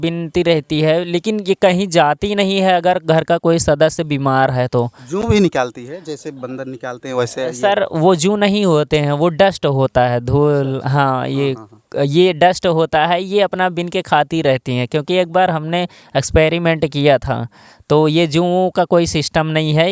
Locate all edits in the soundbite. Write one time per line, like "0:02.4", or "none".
none